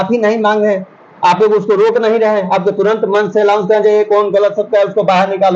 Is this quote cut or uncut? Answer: uncut